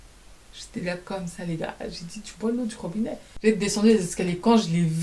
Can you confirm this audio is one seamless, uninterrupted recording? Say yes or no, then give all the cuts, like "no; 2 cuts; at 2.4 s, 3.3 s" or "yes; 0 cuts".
no; 1 cut; at 3.2 s